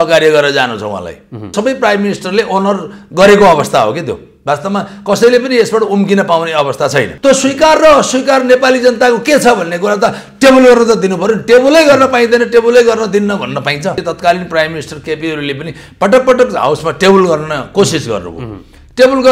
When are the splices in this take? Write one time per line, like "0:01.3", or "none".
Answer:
0:01.5
0:07.1
0:14.0